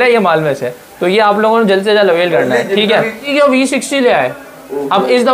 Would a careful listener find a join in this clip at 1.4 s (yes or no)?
no